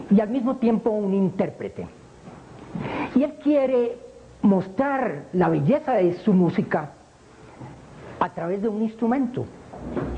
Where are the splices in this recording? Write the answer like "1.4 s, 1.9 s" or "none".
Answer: none